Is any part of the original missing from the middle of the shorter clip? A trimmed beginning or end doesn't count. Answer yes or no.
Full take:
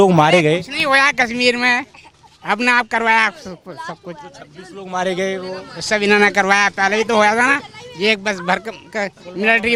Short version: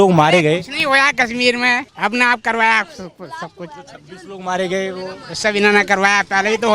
yes